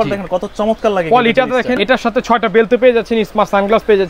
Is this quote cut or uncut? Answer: cut